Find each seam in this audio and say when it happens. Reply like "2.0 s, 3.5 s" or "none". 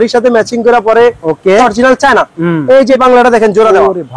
1.6 s, 3.0 s